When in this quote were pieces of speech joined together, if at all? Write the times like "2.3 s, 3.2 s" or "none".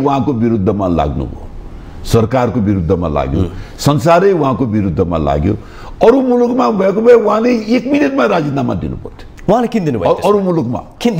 none